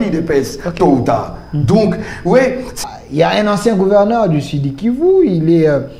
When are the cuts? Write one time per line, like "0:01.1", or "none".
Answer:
0:02.7